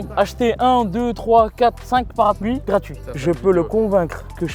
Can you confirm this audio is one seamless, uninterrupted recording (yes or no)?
no